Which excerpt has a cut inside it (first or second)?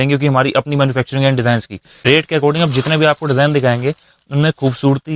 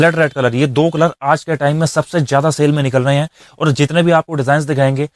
first